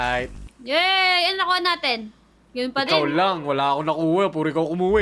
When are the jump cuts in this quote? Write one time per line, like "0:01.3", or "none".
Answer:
none